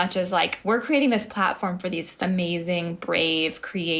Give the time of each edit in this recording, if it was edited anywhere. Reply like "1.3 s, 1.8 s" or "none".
2.2 s